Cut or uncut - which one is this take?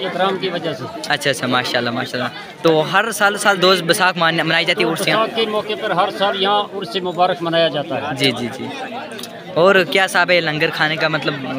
uncut